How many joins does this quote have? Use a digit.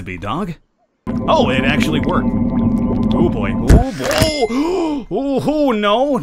1